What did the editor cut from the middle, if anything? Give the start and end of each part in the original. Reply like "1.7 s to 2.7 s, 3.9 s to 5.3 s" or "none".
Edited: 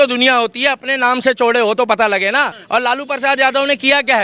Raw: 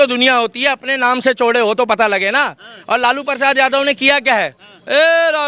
2.6 s to 2.7 s